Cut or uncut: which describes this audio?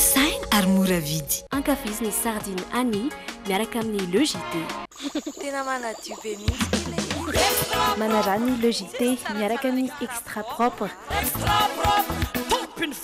uncut